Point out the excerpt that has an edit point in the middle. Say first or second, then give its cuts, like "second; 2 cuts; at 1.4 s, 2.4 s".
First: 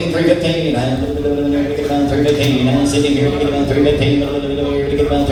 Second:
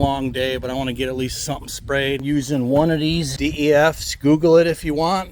second; 2 cuts; at 2.2 s, 3.3 s